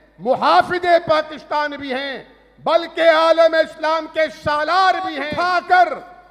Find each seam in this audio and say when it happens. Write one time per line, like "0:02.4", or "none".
0:05.3